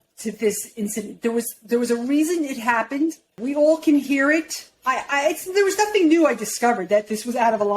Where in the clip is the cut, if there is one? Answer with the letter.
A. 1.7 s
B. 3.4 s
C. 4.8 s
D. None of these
B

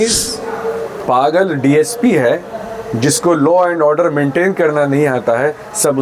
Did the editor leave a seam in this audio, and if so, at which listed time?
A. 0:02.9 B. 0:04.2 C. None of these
C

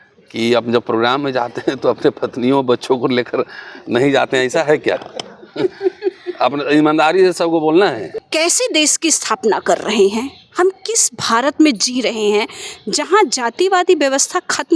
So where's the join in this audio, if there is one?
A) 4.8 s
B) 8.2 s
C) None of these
B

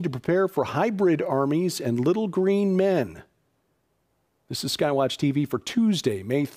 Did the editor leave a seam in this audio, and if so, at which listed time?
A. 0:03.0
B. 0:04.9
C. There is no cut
C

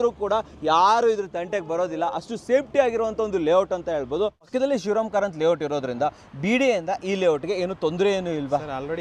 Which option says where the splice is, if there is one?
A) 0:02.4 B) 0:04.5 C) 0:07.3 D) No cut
B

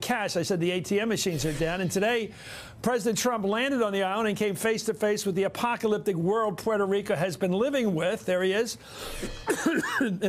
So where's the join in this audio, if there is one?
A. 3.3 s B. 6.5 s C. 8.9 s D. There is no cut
C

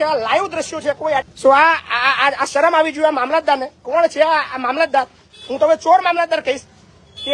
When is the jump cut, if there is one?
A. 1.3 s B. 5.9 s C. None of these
A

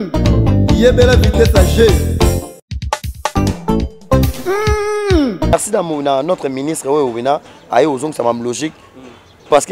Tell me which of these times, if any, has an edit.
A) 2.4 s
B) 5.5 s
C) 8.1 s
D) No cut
B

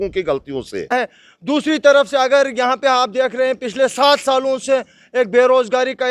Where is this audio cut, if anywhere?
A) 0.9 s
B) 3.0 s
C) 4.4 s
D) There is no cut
A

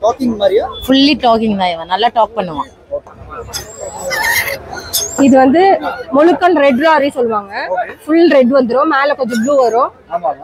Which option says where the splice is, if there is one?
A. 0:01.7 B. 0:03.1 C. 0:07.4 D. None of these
B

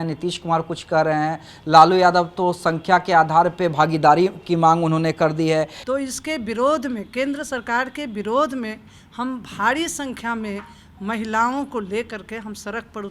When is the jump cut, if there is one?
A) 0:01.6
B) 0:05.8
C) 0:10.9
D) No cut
B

